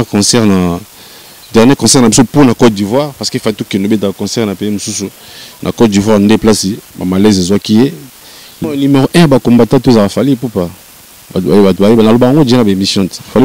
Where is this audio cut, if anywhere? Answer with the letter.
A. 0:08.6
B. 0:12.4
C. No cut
A